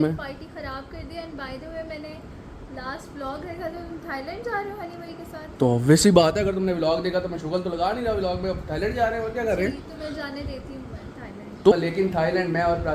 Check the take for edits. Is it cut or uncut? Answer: cut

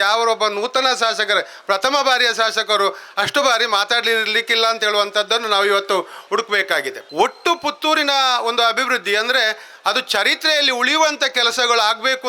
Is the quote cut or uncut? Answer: cut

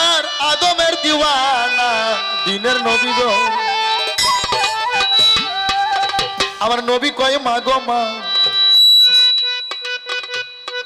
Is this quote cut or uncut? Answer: uncut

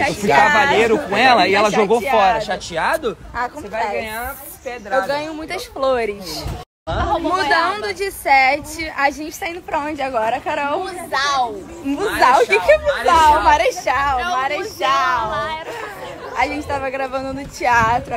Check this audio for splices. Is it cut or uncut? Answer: cut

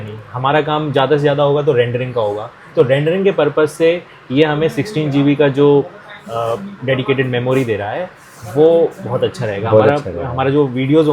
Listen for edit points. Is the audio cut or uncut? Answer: uncut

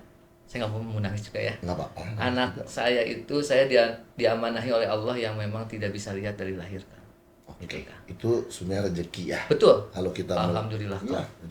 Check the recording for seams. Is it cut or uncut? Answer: uncut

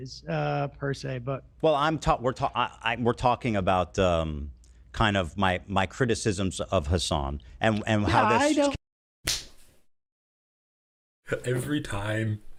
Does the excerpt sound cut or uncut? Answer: uncut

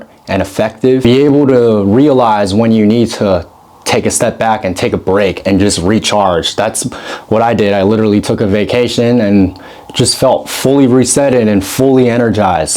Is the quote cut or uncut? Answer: cut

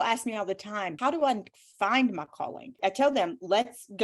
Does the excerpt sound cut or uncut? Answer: cut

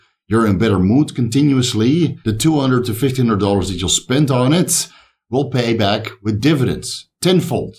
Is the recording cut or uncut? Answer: cut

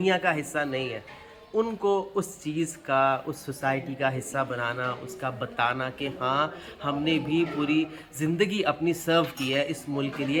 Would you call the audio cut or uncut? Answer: uncut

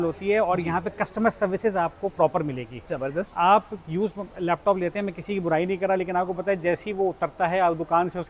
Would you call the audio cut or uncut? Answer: uncut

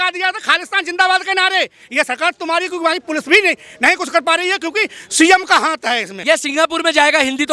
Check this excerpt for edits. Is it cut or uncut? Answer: cut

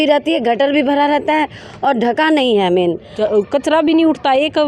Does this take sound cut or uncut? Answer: cut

